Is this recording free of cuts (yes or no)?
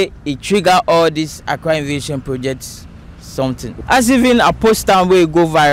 no